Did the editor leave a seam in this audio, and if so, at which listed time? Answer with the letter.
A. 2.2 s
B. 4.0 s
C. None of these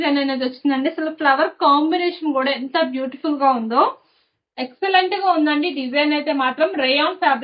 C